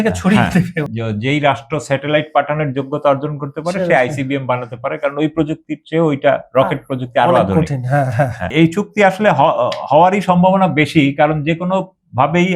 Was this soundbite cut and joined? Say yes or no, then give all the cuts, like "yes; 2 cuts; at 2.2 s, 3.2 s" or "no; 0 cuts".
yes; 2 cuts; at 0.8 s, 8.5 s